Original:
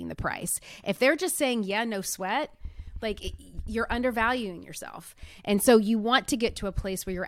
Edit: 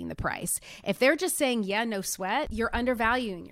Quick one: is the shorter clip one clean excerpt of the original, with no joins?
no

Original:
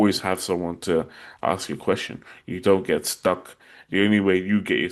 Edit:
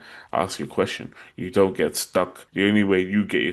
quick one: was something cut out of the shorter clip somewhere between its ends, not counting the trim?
yes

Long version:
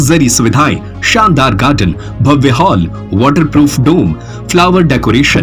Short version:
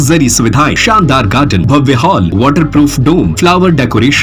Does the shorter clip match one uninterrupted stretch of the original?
no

